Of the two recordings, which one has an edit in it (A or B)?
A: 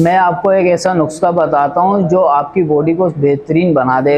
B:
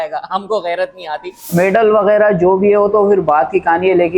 B